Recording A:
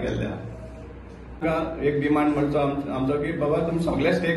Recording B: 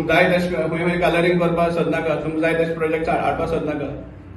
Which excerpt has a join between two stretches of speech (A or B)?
A